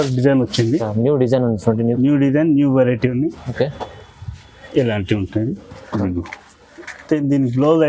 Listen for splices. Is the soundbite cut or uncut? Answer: uncut